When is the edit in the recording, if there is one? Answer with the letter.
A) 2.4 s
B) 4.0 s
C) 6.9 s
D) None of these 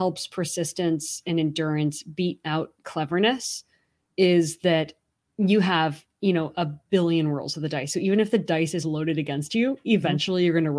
D